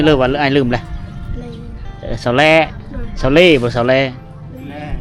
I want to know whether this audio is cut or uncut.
uncut